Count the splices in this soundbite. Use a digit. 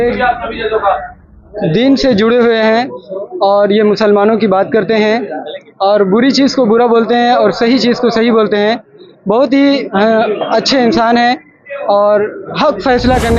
0